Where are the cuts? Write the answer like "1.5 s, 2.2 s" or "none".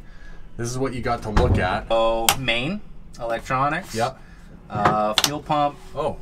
1.9 s